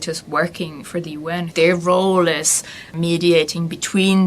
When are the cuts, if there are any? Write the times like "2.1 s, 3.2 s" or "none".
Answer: 1.5 s, 3.0 s

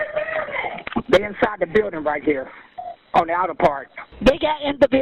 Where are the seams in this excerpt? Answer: none

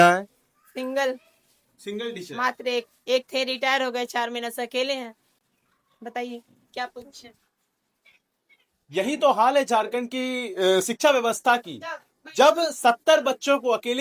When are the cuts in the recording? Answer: none

